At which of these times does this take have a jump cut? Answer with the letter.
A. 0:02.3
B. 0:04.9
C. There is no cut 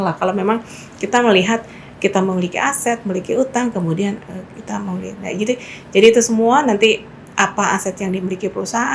C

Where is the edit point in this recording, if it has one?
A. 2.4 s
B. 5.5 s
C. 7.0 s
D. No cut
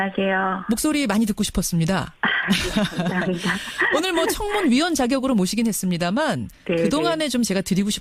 A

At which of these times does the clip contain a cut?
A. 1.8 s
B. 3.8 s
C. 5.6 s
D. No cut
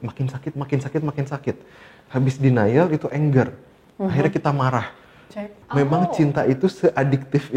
C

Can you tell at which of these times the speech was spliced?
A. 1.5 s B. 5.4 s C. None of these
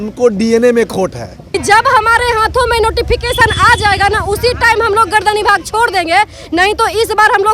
A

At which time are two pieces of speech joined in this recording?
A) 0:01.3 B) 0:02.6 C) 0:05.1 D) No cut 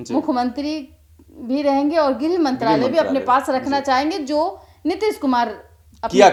D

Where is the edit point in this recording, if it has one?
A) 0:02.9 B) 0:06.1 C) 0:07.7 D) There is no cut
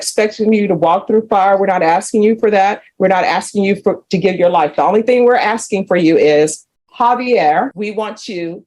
C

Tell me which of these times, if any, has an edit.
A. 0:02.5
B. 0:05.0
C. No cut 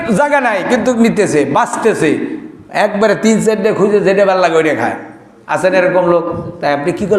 C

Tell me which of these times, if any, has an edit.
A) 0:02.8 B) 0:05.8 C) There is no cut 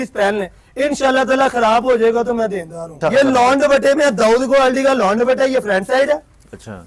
A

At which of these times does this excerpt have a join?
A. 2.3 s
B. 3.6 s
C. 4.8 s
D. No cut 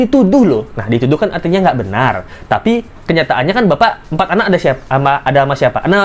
D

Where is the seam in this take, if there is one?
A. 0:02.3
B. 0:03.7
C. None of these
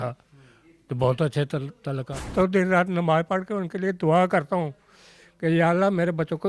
A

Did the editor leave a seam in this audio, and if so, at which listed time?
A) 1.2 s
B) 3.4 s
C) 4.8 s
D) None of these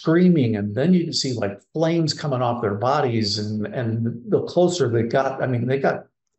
D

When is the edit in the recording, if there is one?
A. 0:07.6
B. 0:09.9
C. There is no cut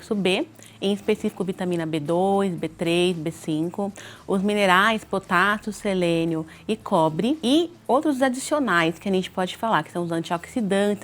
A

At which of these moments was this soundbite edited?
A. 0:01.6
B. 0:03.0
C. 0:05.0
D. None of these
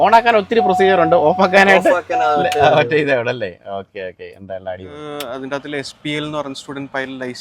C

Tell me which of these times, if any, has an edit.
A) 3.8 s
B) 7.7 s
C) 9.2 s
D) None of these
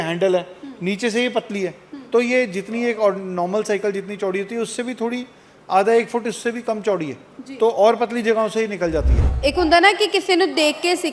C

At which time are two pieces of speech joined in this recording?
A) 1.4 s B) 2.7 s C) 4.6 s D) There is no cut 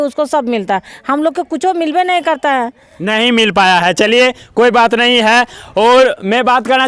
D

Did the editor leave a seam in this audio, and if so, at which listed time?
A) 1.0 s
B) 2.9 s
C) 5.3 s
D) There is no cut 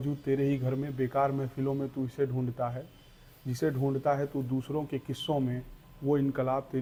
D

